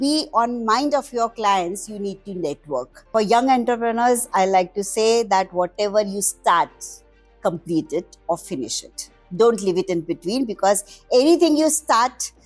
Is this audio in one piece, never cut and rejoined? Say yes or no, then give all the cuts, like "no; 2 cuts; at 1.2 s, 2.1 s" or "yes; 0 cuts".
no; 1 cut; at 3.0 s